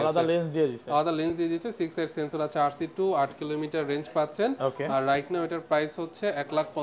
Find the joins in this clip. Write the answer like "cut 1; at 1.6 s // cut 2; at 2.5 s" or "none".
none

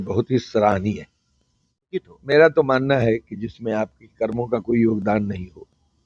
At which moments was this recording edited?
cut 1; at 2.0 s

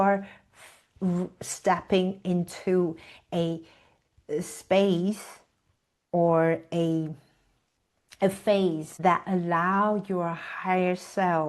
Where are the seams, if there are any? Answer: cut 1; at 8.9 s

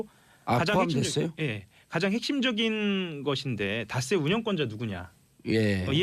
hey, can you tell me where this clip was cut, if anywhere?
cut 1; at 2.3 s

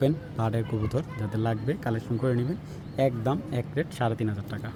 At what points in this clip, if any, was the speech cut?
none

